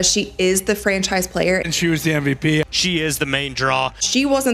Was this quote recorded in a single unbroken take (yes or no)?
yes